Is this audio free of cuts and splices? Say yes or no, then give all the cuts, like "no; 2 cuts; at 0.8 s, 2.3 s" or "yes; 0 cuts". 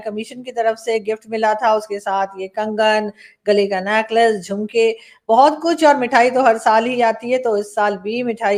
yes; 0 cuts